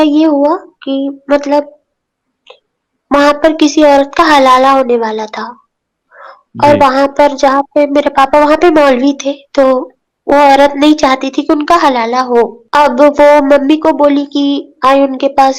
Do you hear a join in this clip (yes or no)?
no